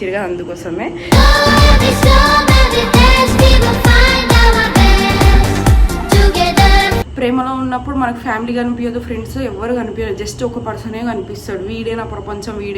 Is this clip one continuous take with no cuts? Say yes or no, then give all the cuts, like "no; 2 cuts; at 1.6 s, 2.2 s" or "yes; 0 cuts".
no; 1 cut; at 7.1 s